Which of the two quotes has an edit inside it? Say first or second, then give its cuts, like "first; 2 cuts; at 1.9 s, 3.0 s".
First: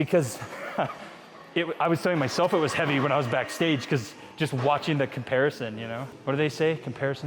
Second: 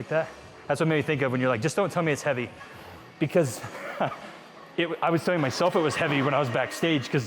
first; 1 cut; at 6.1 s